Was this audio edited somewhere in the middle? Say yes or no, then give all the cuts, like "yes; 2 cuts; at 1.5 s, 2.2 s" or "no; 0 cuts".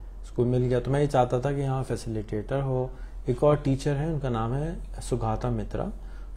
no; 0 cuts